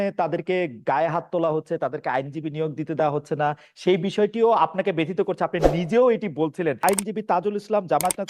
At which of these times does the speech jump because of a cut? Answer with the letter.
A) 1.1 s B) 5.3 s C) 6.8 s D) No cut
C